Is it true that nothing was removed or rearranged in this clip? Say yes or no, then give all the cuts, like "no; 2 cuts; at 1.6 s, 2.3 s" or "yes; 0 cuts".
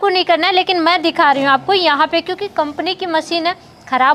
yes; 0 cuts